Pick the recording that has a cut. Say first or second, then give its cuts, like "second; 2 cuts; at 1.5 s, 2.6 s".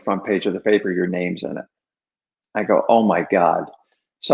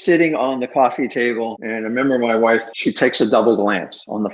second; 2 cuts; at 1.6 s, 2.7 s